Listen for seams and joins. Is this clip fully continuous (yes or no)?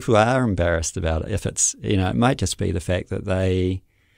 yes